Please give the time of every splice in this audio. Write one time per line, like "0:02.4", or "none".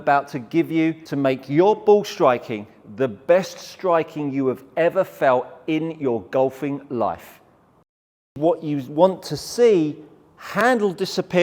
0:01.0
0:08.3